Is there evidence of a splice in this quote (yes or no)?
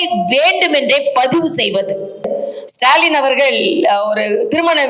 yes